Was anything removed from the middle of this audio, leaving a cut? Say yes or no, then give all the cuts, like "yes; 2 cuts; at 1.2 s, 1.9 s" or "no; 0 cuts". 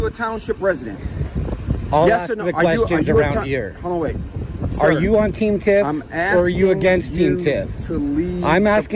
no; 0 cuts